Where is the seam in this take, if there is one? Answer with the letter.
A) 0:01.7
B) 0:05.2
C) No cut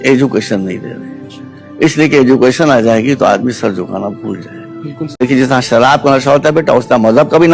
B